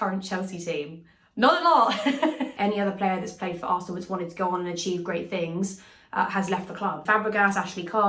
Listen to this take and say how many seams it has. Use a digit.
2